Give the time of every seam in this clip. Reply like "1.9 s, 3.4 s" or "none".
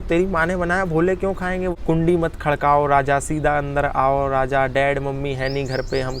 1.8 s